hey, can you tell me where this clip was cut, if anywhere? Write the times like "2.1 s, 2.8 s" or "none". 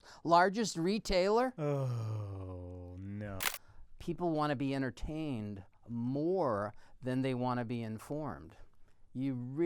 1.6 s, 3.4 s